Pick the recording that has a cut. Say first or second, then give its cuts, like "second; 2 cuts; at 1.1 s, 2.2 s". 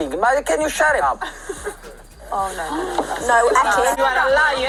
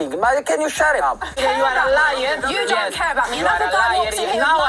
second; 1 cut; at 1.6 s